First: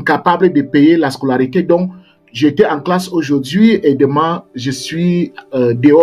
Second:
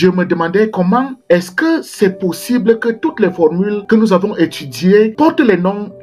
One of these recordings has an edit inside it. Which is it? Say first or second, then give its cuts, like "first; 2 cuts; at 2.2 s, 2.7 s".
second; 3 cuts; at 1.1 s, 3.8 s, 5.1 s